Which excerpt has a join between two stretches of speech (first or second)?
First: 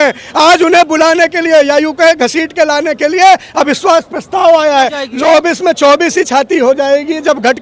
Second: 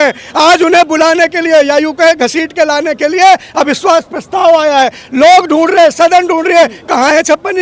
first